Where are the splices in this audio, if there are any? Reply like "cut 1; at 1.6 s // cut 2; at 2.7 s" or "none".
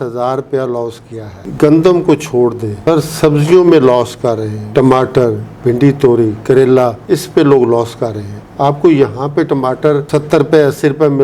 none